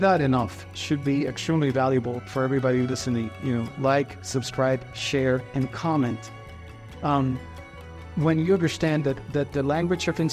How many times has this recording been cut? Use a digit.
0